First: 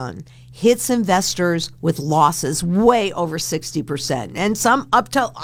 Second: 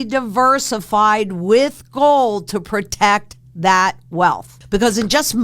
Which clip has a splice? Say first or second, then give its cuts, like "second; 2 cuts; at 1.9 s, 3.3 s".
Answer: second; 1 cut; at 4.5 s